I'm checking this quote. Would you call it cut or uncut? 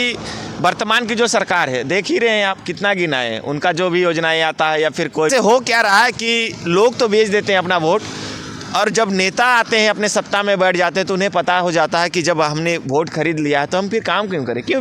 cut